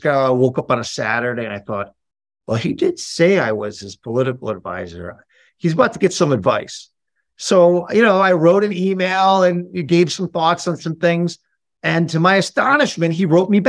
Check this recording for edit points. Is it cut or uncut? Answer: uncut